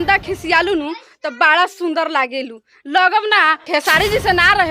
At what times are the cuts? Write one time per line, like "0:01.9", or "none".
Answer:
0:03.7